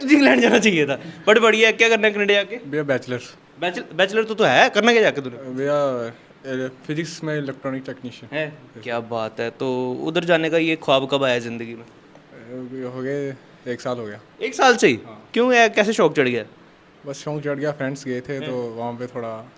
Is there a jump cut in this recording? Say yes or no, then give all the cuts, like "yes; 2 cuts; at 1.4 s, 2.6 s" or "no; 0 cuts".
no; 0 cuts